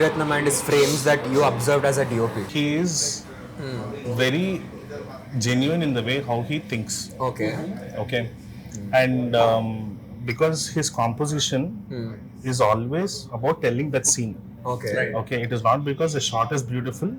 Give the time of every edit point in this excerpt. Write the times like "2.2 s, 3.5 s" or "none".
2.5 s